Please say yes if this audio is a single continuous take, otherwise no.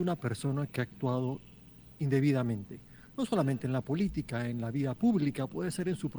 yes